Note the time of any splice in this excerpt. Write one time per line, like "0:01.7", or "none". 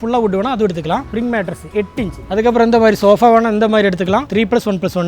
0:01.1
0:02.2
0:04.3

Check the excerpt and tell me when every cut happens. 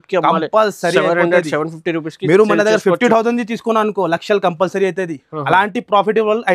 none

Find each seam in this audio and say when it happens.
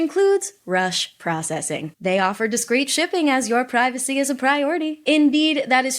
0:01.9
0:05.0

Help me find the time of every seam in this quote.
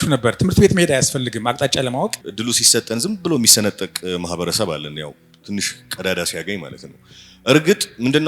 0:02.3
0:05.3

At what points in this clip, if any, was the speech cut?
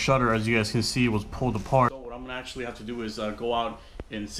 0:01.9

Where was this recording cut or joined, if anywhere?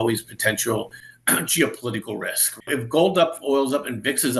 0:02.7

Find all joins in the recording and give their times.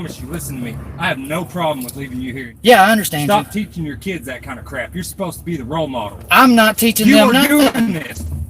0:02.5

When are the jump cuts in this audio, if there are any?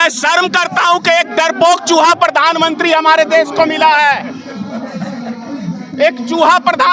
none

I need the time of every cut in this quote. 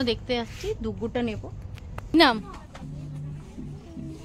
0:02.1

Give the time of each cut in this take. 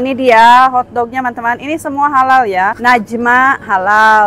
0:02.8

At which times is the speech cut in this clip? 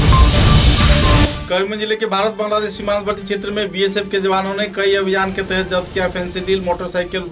0:01.4

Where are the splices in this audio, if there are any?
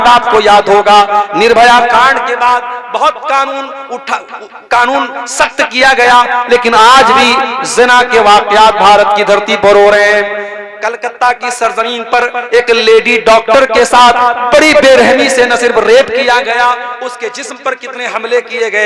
none

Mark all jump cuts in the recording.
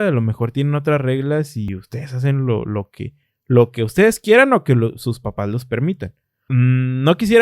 0:01.7

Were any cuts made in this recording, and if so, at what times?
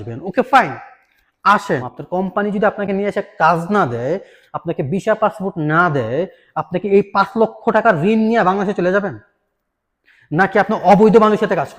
0:01.9

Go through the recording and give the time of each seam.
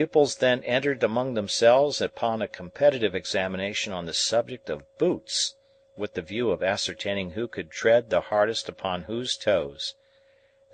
none

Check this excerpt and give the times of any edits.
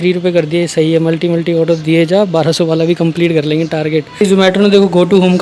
0:04.2

